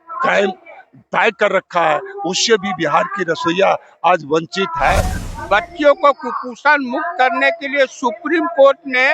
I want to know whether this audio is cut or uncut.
cut